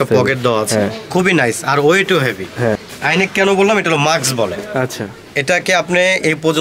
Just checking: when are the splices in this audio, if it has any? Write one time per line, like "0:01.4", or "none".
0:02.9